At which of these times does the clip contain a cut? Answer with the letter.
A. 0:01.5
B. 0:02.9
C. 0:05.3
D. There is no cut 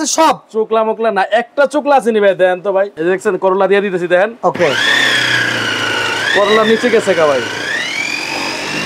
B